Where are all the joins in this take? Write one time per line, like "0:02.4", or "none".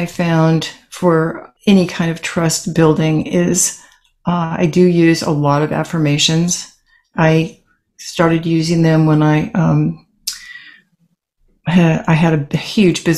0:01.4